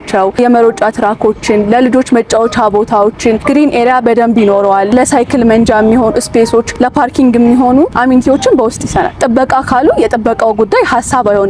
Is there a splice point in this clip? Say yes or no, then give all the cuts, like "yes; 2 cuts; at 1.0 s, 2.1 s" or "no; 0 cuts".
yes; 3 cuts; at 4.9 s, 7.9 s, 9.1 s